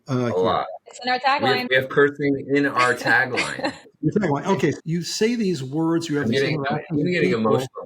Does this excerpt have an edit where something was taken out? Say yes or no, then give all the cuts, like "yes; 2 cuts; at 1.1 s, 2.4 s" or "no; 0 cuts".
yes; 3 cuts; at 1.7 s, 3.9 s, 4.8 s